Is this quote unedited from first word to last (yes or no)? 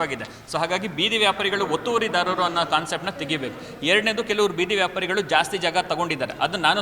yes